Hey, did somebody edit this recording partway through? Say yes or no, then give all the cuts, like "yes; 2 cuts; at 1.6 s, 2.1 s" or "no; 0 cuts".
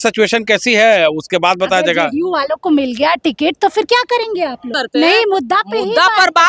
yes; 1 cut; at 4.7 s